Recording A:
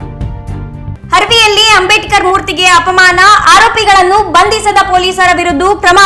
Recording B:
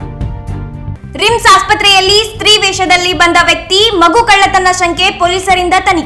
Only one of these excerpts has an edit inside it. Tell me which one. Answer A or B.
A